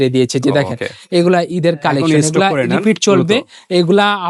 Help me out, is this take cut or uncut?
uncut